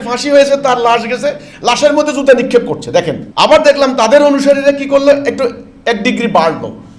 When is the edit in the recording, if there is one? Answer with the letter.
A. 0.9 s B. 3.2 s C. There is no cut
B